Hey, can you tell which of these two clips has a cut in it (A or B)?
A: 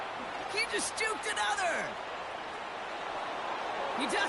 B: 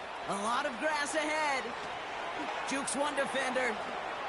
B